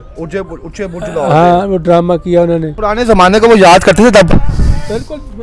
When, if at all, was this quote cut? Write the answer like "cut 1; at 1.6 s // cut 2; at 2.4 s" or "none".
cut 1; at 2.8 s